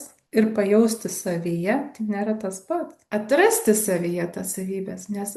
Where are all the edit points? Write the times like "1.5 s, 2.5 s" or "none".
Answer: 3.0 s